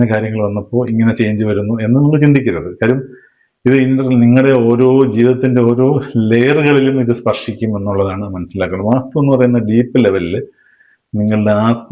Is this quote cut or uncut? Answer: uncut